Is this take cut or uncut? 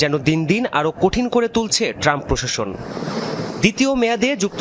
cut